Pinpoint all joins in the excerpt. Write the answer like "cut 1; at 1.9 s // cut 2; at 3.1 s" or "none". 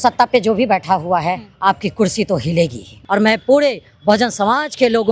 cut 1; at 2.9 s